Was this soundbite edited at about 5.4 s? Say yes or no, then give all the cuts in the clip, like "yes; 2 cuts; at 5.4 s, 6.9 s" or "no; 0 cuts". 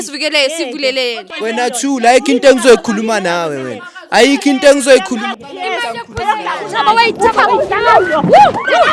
yes; 2 cuts; at 1.3 s, 5.4 s